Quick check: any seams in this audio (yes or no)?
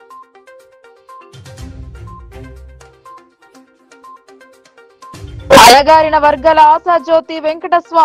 no